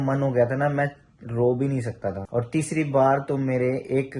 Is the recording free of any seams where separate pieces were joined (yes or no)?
no